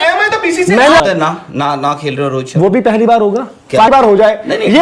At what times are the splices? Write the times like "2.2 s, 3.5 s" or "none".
1.0 s, 3.9 s